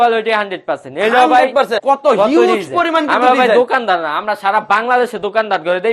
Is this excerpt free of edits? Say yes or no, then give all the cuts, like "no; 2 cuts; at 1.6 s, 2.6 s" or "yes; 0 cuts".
no; 1 cut; at 1.8 s